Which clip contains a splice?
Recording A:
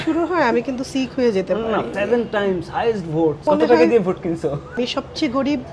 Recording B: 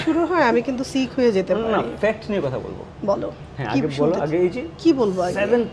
A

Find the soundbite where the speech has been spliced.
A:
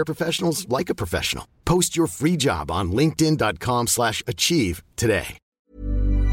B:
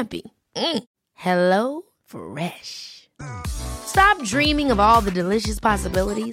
A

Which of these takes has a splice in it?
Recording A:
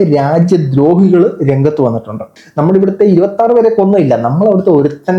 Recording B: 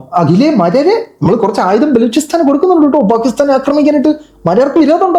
A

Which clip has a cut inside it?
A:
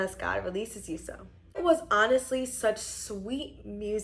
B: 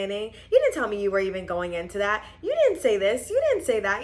A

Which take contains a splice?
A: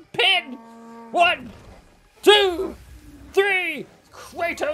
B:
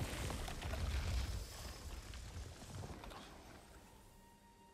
B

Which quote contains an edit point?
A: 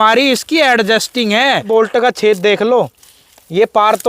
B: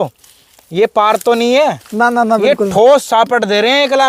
A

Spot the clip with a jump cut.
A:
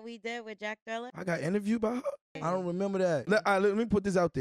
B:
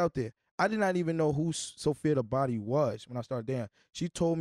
A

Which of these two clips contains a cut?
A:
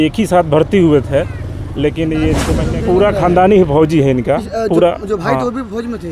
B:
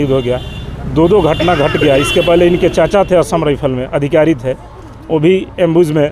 A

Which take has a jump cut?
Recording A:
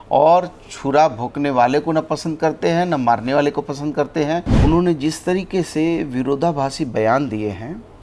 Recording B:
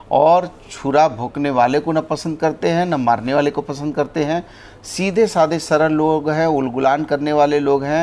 A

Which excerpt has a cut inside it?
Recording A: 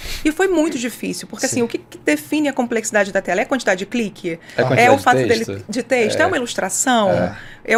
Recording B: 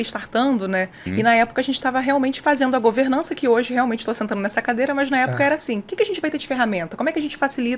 B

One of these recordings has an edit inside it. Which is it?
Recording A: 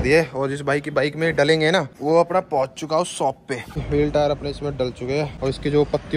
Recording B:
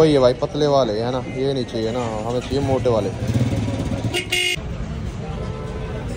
A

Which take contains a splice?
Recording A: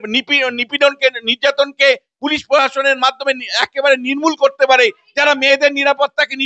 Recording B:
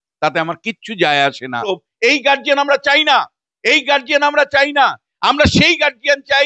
B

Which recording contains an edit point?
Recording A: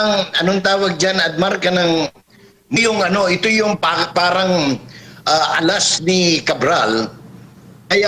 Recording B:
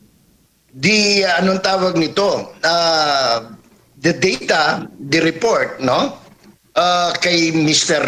A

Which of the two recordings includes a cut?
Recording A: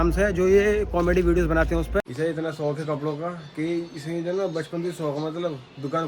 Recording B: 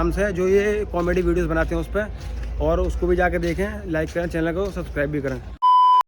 A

